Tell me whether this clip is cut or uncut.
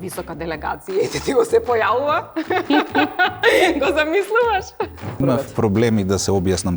cut